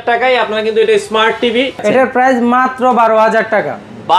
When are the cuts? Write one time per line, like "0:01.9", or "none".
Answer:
0:01.8